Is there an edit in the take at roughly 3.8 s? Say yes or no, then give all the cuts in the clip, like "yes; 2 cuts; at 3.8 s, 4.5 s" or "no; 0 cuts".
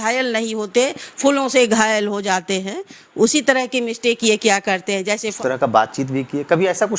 no; 1 cut; at 5.3 s